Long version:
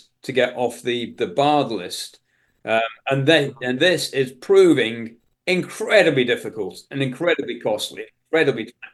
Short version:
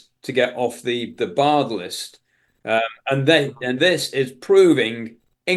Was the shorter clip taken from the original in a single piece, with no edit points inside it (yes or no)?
yes